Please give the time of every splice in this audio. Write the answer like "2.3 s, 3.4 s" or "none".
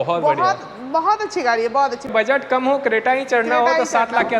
2.1 s

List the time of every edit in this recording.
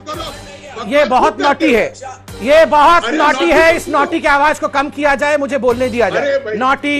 none

